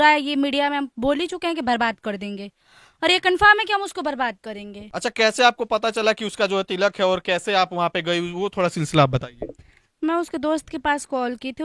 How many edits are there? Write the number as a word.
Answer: one